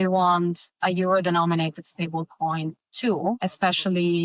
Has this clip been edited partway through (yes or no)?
no